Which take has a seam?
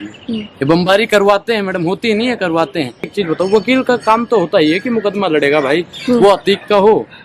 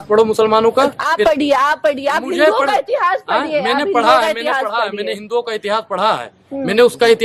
first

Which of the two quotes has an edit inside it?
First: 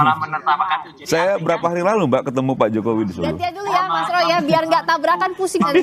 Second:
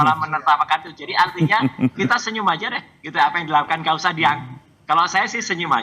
first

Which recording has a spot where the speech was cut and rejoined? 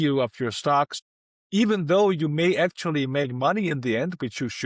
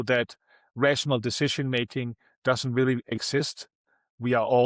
first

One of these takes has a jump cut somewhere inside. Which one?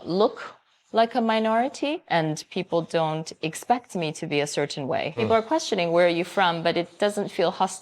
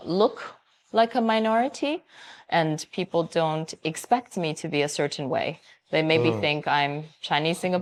first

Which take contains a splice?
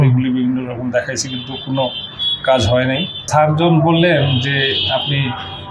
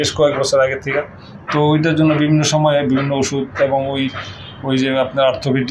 first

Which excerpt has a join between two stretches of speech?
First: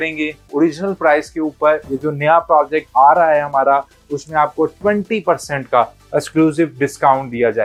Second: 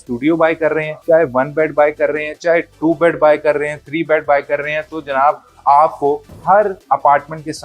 second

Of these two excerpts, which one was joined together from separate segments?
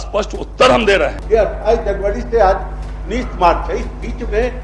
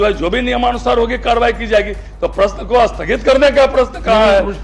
first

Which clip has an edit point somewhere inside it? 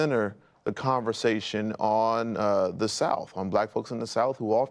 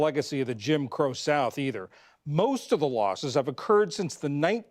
second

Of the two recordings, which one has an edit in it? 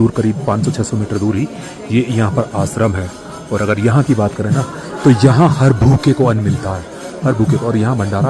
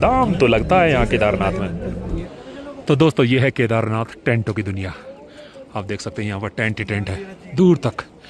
second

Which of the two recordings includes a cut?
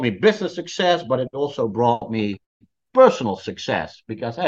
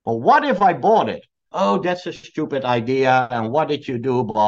second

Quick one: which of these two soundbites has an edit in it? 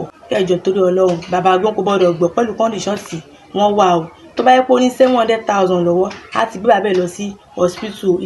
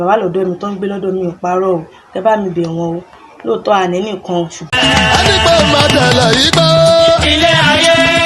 second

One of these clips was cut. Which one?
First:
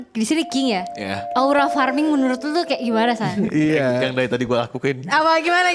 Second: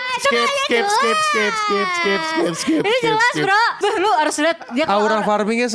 second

